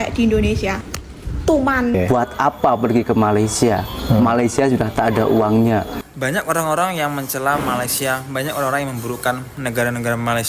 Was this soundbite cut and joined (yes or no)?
yes